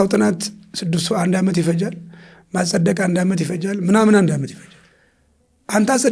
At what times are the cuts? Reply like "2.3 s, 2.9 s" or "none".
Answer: none